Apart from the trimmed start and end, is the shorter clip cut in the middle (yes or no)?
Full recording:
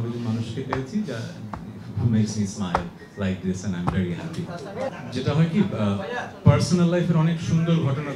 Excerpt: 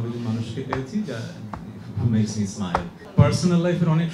yes